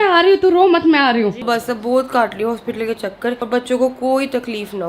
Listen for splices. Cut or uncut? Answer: cut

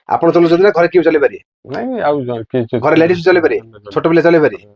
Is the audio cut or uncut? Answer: uncut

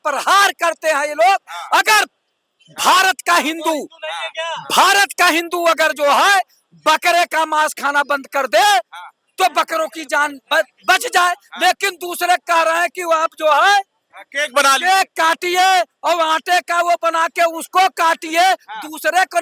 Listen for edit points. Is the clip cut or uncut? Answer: uncut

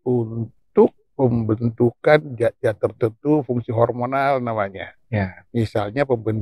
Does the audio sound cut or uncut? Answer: uncut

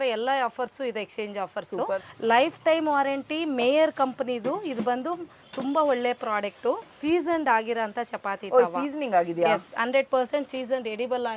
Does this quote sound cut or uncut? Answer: cut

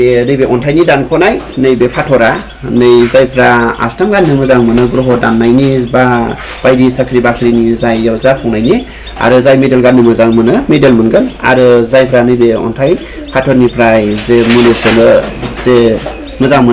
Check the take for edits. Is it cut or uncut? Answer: uncut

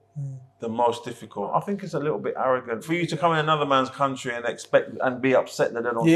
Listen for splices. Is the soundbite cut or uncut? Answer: cut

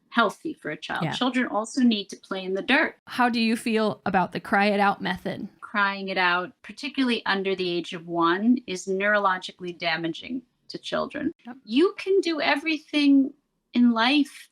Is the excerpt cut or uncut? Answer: cut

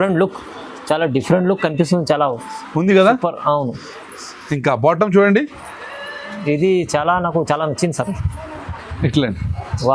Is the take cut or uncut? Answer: uncut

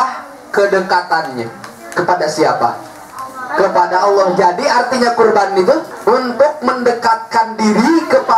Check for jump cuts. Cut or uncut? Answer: cut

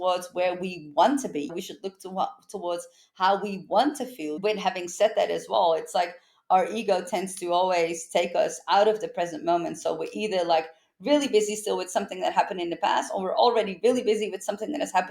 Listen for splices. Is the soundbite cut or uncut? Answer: cut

